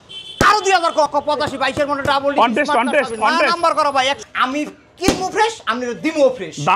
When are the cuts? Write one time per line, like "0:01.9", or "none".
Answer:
0:01.1
0:04.3